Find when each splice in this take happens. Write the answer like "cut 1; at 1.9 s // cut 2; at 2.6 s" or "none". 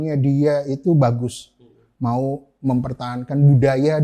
none

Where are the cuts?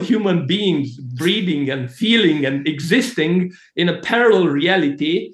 none

